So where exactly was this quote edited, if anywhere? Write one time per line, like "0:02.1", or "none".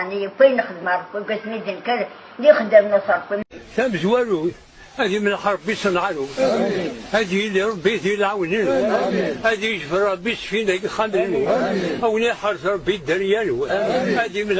0:03.4